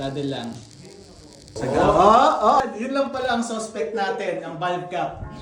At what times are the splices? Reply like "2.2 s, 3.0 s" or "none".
1.4 s, 2.6 s